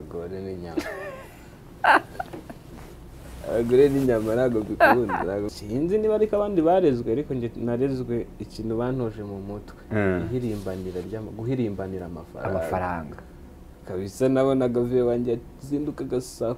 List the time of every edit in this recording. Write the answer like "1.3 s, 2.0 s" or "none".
5.5 s

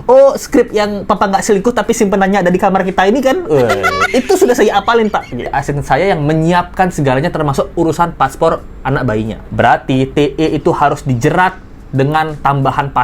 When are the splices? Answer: 5.5 s

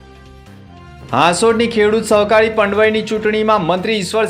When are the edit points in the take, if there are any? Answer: none

